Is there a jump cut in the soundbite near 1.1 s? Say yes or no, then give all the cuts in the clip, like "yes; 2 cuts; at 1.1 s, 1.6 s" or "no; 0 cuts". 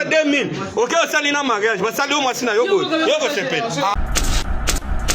no; 1 cut; at 3.9 s